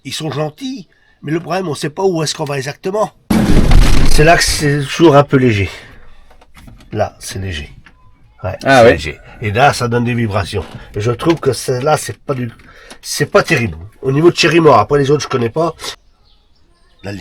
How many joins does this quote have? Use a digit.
2